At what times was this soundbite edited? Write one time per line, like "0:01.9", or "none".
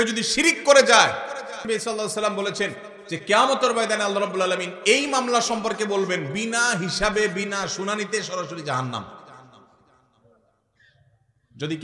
0:01.6

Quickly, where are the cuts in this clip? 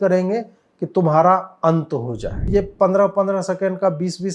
0:02.5

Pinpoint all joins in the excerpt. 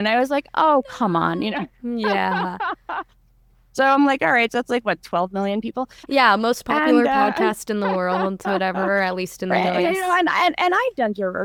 none

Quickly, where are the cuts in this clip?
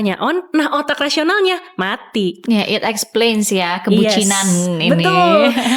none

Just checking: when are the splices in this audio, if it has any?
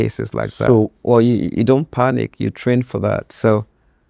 0:01.0

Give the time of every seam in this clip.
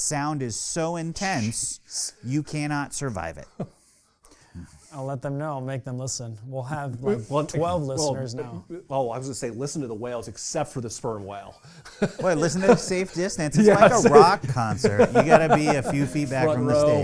0:04.5

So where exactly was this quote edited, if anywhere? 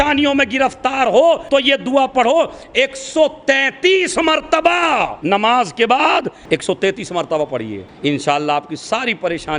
0:01.4
0:05.1
0:06.4
0:07.8

